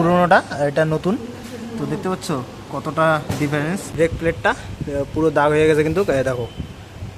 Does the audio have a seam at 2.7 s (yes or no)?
no